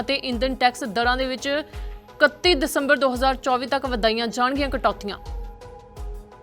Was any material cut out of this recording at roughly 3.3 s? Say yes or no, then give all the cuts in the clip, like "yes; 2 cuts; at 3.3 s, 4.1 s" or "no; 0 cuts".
no; 1 cut; at 5.2 s